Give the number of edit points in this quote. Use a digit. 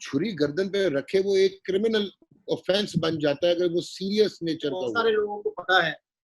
1